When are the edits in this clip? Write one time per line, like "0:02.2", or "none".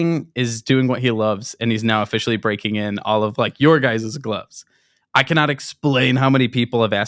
none